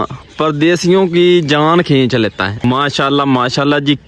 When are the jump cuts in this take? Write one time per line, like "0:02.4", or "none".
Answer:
0:02.6